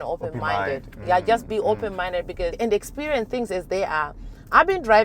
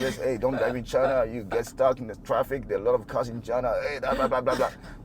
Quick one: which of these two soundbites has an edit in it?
first; 1 cut; at 2.5 s

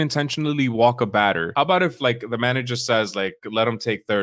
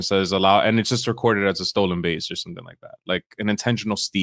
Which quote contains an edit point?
first; 1 cut; at 1.5 s

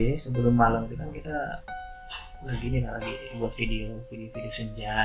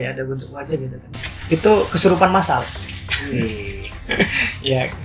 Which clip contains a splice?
second; 1 cut; at 1.0 s

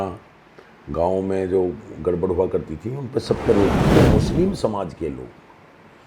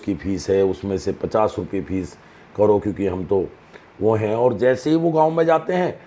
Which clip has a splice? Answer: first; 1 cut; at 3.9 s

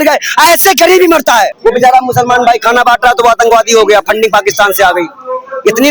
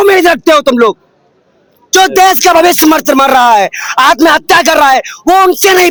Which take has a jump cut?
first; 1 cut; at 1.5 s

